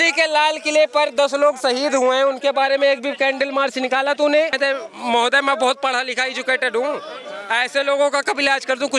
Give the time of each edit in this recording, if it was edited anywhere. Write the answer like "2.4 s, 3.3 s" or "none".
4.5 s